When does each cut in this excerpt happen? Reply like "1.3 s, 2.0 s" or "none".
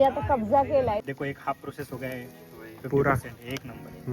1.1 s